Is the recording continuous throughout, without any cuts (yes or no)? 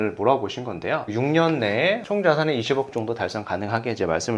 no